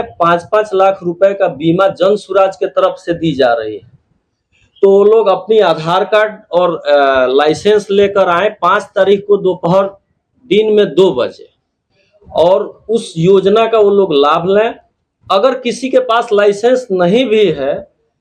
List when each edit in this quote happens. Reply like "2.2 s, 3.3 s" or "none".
none